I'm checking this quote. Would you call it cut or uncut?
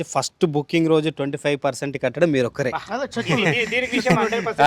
uncut